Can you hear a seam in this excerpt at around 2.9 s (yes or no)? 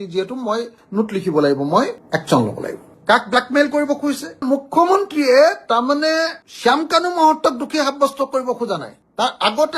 yes